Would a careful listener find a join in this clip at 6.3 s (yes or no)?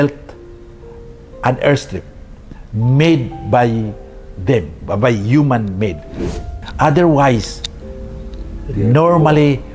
yes